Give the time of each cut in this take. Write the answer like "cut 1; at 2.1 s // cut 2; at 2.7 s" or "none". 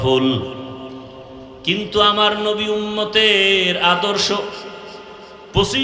none

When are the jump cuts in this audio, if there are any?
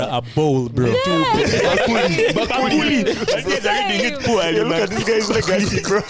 none

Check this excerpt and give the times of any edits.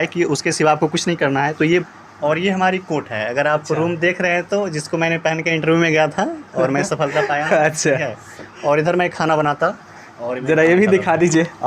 cut 1; at 1.8 s

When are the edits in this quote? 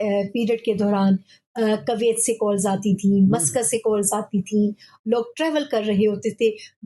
none

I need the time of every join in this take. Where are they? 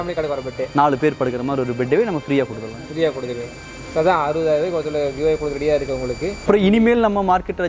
cut 1; at 6.5 s

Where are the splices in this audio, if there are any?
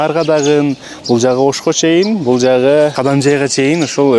cut 1; at 3.0 s

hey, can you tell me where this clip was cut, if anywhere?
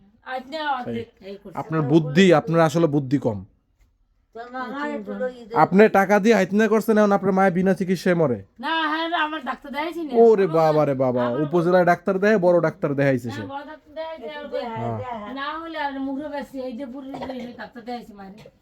none

